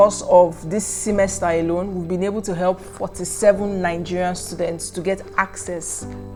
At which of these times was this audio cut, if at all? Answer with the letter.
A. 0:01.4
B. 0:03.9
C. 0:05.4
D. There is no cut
D